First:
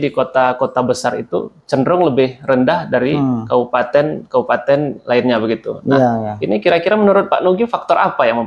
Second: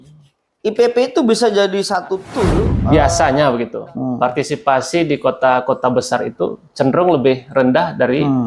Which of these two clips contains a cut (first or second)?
second